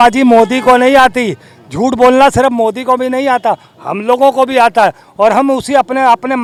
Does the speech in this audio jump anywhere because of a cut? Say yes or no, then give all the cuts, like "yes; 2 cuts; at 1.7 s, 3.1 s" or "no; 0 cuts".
no; 0 cuts